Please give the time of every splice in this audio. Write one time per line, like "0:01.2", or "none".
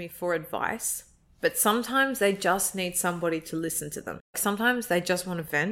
0:04.4